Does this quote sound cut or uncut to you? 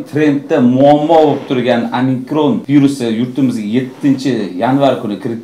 cut